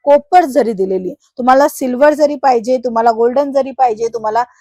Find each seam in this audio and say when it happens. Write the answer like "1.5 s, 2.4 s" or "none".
none